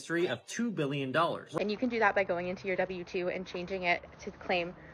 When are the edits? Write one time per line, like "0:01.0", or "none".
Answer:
0:01.5